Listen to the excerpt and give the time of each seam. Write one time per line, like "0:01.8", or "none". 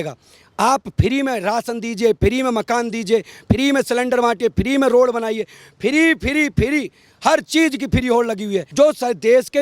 0:08.7